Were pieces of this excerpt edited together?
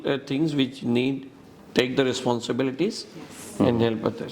no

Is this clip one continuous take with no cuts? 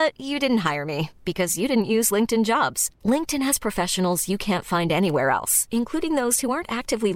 yes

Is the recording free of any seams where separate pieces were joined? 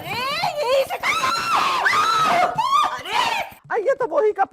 no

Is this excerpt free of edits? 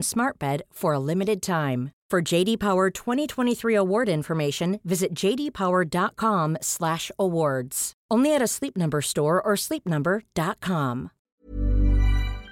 no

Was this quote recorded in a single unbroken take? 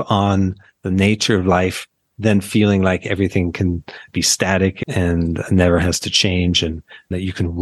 yes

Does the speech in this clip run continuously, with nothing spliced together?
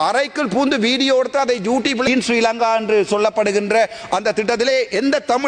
no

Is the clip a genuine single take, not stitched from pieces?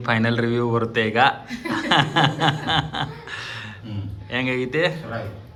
yes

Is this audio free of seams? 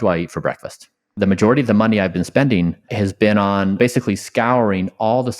no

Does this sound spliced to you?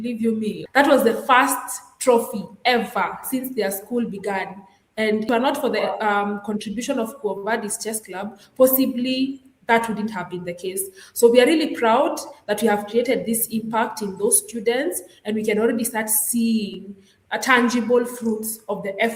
yes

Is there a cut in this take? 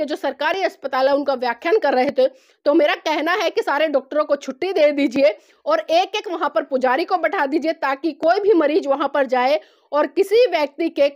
no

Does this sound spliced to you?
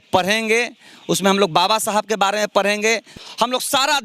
yes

